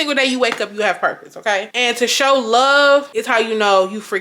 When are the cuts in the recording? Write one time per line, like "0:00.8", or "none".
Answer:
0:01.7